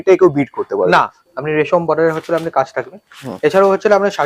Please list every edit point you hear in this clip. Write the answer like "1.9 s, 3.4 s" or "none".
1.2 s